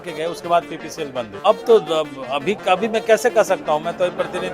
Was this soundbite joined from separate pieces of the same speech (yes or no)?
yes